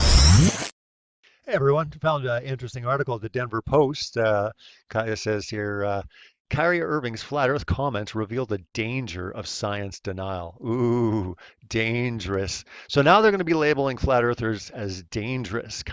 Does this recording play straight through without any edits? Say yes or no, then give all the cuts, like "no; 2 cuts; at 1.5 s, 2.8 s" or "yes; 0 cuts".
yes; 0 cuts